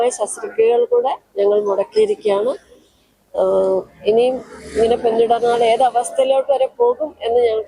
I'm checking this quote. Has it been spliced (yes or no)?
no